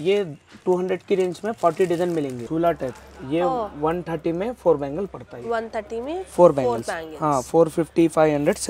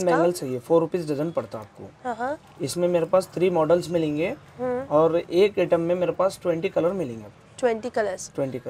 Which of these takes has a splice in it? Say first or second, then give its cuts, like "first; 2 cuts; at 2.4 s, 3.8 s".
first; 1 cut; at 2.4 s